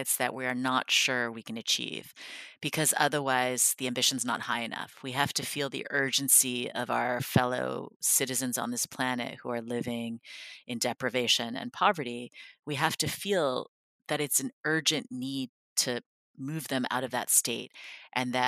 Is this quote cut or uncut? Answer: uncut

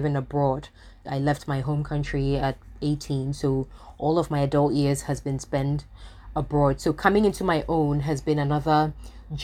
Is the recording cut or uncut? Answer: cut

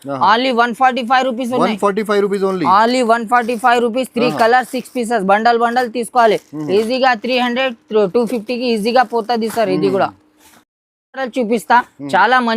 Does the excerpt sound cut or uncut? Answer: uncut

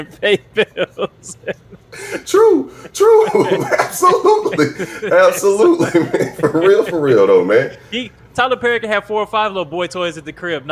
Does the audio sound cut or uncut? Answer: uncut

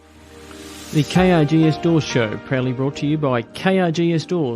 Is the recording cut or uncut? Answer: cut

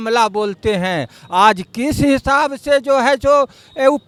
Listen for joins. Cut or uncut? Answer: uncut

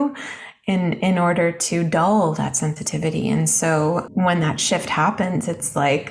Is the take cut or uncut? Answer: cut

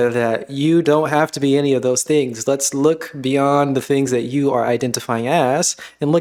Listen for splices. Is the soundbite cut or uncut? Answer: uncut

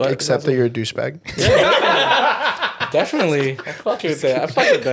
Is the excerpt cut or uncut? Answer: uncut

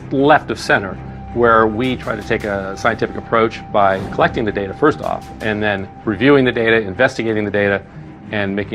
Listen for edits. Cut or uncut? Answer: cut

